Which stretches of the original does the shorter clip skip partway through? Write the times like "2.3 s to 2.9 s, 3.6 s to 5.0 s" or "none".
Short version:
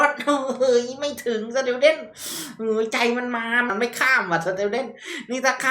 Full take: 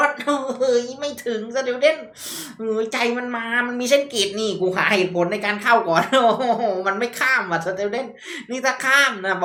3.7 s to 6.9 s